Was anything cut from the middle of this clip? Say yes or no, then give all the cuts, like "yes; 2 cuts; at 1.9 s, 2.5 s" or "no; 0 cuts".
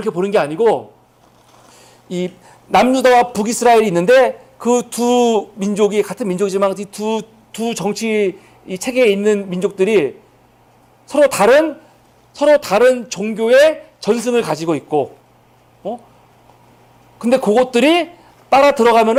no; 0 cuts